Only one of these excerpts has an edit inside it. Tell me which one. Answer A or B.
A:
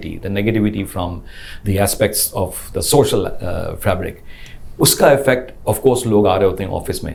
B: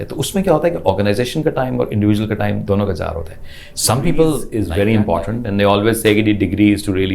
B